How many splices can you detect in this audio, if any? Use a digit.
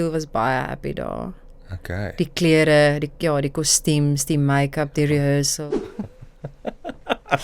1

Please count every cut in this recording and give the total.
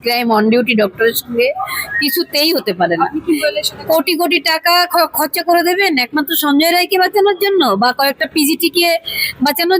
1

